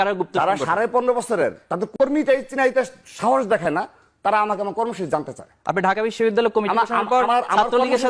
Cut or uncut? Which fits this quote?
uncut